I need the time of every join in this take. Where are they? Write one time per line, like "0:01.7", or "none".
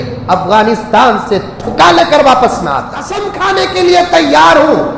0:03.3

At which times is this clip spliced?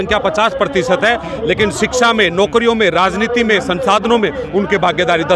none

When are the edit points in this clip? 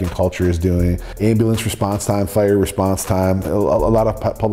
0:01.1

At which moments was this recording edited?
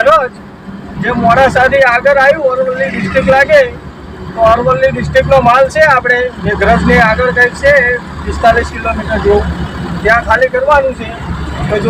none

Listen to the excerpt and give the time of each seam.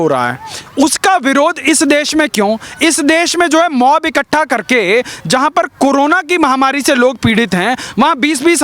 none

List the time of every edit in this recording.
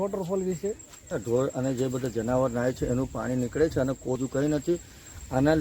0:01.1
0:04.2

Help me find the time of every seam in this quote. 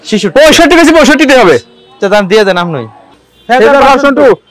0:03.0

